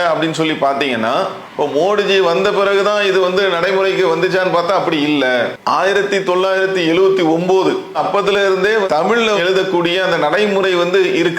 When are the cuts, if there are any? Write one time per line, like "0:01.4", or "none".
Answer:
0:05.6